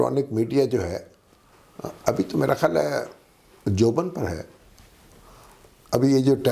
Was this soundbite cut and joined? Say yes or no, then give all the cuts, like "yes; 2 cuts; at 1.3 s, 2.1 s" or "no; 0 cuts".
no; 0 cuts